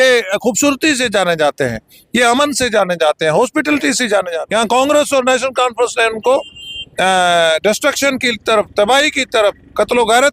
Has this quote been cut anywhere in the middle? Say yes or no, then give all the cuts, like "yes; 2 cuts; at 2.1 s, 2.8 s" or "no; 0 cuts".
yes; 1 cut; at 4.3 s